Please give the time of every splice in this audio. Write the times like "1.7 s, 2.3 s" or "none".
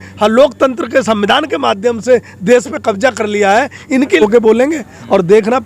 4.2 s